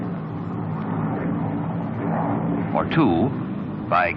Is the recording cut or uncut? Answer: uncut